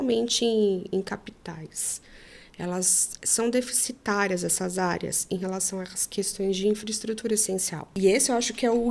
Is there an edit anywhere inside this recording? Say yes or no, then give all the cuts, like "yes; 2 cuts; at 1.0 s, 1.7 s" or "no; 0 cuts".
yes; 1 cut; at 7.9 s